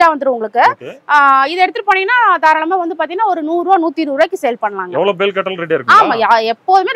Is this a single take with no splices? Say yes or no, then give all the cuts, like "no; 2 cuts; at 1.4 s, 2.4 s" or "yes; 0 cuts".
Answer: yes; 0 cuts